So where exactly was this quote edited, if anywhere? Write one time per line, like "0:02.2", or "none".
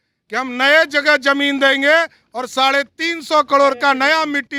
none